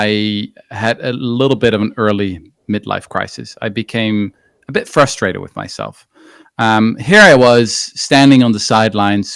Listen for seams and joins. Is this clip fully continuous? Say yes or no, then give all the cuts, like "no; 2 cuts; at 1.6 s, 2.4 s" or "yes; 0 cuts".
yes; 0 cuts